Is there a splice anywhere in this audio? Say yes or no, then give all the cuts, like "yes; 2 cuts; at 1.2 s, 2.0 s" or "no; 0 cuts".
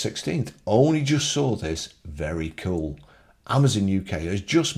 no; 0 cuts